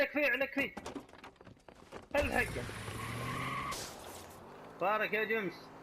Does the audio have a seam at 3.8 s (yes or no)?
yes